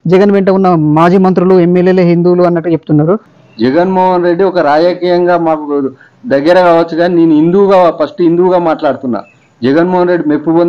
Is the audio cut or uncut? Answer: cut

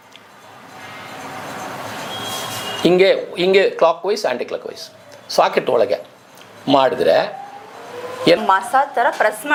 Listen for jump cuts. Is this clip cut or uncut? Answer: uncut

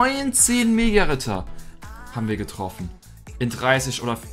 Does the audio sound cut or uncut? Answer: uncut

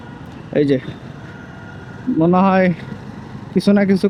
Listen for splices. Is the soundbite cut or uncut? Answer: uncut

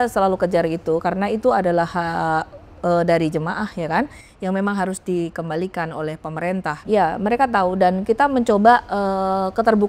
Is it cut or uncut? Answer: cut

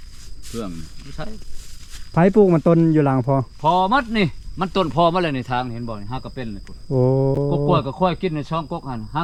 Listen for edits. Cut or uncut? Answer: uncut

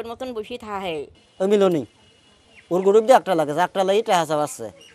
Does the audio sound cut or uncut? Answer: cut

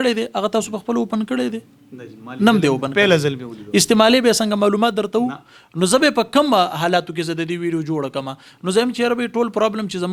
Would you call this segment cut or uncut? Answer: uncut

